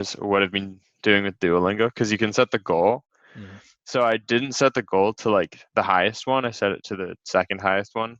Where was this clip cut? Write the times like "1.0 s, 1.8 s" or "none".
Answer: none